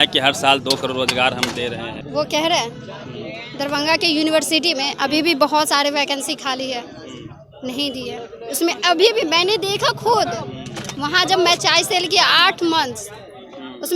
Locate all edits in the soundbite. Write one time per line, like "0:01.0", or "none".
0:02.0